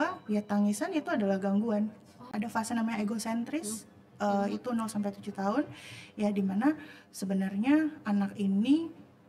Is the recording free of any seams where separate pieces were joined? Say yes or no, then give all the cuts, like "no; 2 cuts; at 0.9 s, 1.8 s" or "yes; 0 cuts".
no; 1 cut; at 2.3 s